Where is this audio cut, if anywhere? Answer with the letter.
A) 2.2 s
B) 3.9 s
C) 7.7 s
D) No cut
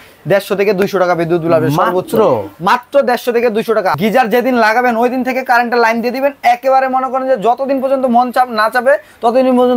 B